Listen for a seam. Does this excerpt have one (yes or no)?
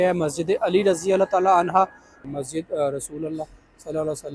yes